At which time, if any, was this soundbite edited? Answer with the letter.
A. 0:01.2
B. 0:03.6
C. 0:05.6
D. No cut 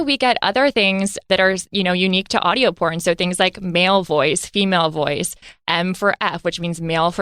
A